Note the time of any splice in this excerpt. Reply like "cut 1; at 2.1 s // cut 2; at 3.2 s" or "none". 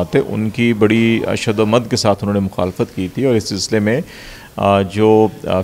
none

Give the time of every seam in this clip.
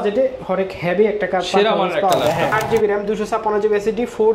cut 1; at 2.6 s

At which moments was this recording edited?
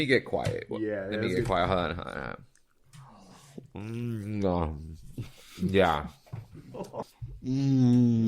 cut 1; at 7.1 s

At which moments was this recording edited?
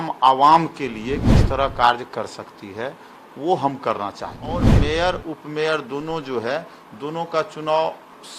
cut 1; at 4.7 s

